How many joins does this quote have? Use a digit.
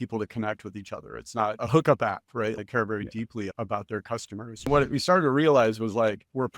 4